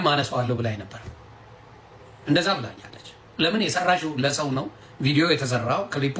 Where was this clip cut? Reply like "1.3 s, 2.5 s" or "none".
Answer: none